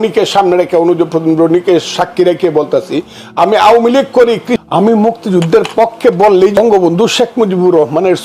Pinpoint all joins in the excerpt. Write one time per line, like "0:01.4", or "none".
0:04.5
0:06.6